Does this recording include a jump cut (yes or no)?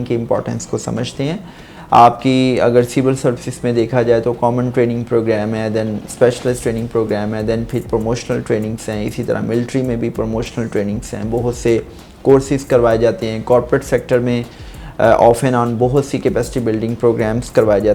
no